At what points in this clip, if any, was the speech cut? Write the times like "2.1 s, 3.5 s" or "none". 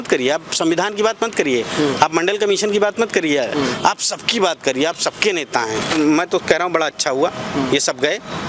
5.9 s